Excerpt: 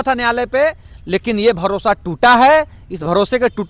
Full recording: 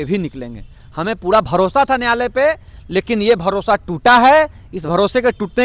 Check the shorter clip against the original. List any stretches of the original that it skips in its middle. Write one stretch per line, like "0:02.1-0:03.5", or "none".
none